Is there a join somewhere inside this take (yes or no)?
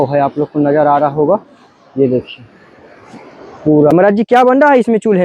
yes